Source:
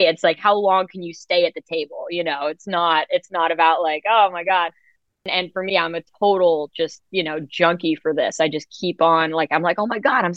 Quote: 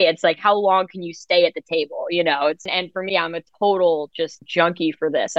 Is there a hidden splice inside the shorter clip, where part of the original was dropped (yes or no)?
yes